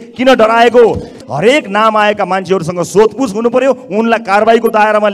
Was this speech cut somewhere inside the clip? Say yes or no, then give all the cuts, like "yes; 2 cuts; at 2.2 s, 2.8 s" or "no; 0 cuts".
yes; 1 cut; at 1.2 s